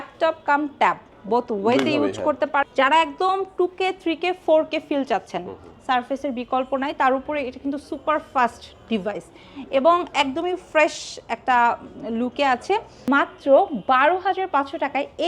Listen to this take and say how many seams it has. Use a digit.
2